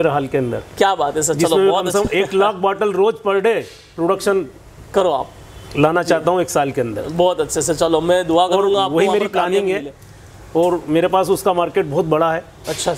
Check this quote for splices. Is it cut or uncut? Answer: uncut